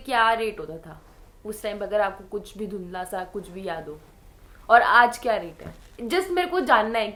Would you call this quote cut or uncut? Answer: uncut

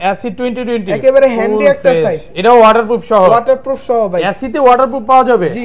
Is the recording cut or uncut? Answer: uncut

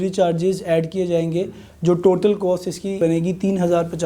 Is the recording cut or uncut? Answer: cut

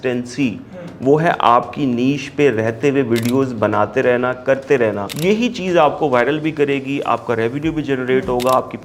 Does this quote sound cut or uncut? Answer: cut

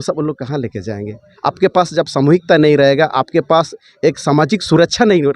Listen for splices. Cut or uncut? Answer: uncut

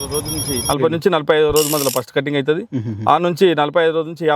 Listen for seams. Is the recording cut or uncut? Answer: uncut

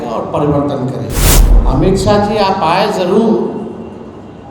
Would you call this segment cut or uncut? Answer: cut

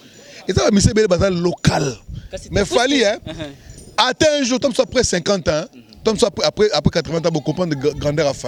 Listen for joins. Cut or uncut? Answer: uncut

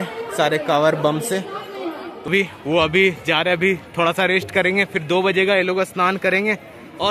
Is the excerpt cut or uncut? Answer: cut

